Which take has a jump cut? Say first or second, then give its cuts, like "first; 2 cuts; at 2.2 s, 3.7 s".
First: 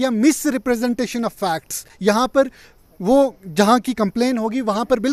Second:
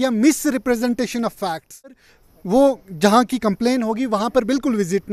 second; 1 cut; at 2.0 s